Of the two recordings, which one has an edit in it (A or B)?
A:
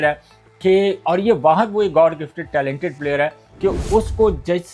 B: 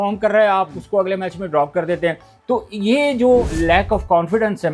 B